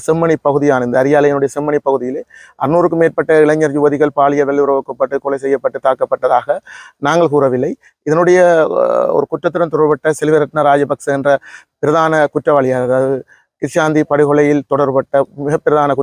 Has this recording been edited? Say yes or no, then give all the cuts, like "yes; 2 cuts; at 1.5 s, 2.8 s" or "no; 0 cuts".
no; 0 cuts